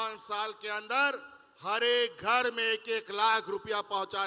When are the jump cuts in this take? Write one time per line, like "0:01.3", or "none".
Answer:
none